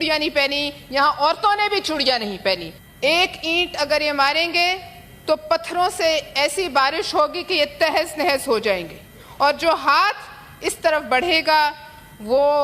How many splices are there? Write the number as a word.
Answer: one